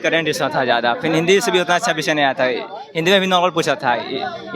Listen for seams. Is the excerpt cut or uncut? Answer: uncut